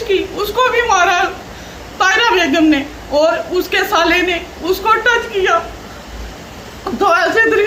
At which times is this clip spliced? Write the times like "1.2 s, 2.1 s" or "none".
none